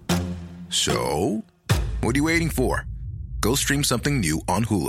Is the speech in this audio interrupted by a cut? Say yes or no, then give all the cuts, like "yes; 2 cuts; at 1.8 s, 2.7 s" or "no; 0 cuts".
no; 0 cuts